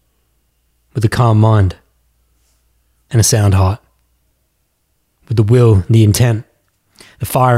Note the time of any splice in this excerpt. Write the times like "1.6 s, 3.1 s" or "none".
none